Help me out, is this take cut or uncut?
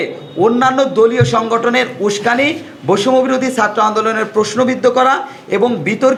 uncut